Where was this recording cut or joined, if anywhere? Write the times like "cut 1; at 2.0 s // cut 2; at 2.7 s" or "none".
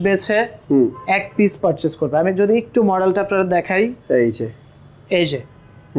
none